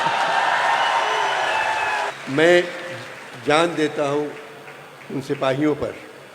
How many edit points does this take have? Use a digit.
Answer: 1